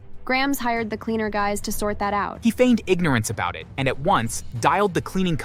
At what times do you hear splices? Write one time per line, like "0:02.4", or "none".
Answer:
0:02.3